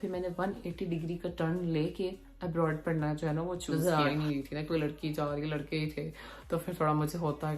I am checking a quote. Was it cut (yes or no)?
yes